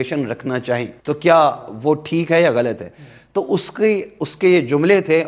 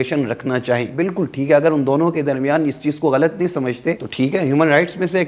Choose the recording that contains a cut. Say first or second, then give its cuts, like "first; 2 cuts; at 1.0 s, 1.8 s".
second; 2 cuts; at 0.9 s, 4.1 s